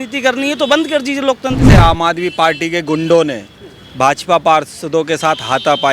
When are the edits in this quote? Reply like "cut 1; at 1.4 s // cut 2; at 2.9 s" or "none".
cut 1; at 1.7 s